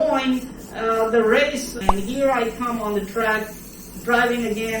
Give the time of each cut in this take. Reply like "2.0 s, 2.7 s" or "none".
1.8 s